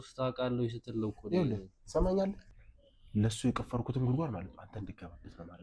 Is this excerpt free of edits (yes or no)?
yes